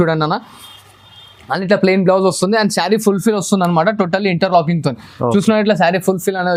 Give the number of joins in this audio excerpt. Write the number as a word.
zero